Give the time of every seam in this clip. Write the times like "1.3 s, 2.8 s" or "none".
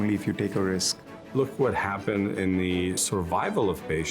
1.2 s, 3.0 s